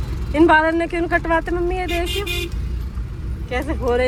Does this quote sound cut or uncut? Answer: uncut